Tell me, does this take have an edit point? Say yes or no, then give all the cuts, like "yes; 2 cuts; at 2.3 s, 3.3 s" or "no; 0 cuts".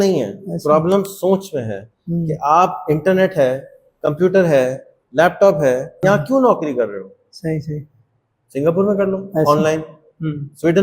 yes; 1 cut; at 5.9 s